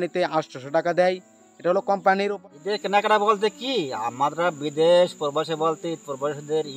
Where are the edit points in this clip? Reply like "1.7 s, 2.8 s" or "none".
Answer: 2.4 s